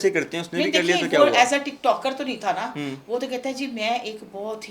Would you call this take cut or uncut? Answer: uncut